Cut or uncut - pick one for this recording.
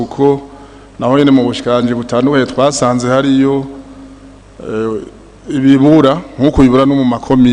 uncut